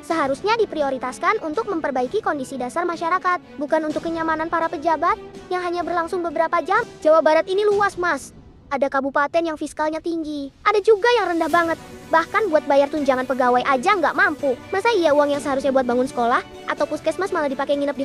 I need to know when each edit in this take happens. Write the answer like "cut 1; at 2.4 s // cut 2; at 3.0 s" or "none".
none

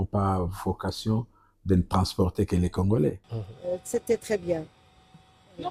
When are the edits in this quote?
none

